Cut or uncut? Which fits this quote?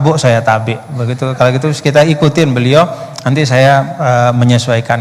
uncut